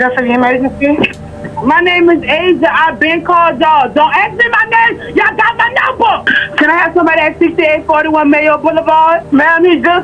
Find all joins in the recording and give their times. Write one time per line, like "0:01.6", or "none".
0:01.5
0:06.3
0:09.2